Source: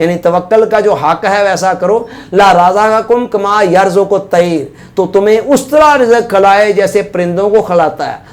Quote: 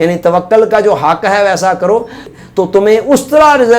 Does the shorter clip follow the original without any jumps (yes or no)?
no